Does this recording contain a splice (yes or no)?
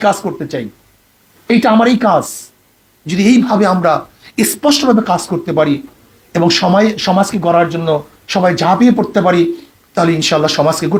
no